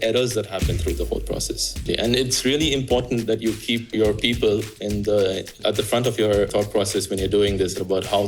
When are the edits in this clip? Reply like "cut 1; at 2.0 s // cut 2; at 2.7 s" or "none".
cut 1; at 1.8 s // cut 2; at 3.9 s // cut 3; at 5.5 s // cut 4; at 6.5 s

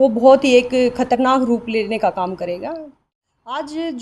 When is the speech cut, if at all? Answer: cut 1; at 2.9 s

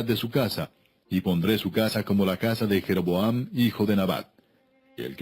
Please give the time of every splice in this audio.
cut 1; at 2.4 s

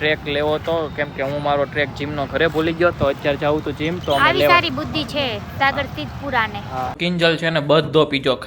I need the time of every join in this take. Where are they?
cut 1; at 7.0 s

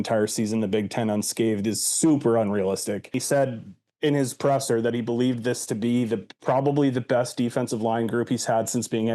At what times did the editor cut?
cut 1; at 3.2 s

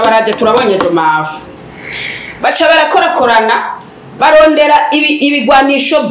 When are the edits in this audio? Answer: none

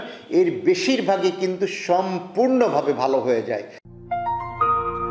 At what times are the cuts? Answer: cut 1; at 3.8 s

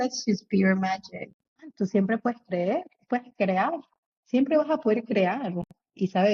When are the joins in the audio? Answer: cut 1; at 1.5 s

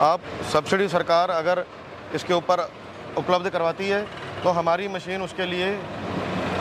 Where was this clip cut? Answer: none

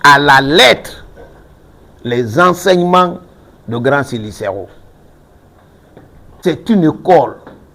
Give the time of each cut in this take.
cut 1; at 6.4 s

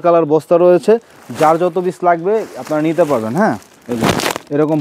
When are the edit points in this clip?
none

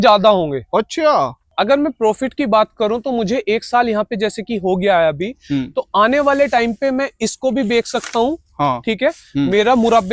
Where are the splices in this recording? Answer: cut 1; at 1.4 s

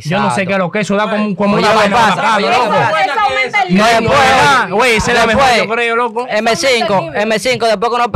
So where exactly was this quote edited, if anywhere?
none

